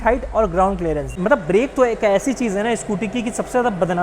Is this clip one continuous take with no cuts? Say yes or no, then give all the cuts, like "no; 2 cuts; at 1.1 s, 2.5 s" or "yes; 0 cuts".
no; 1 cut; at 1.1 s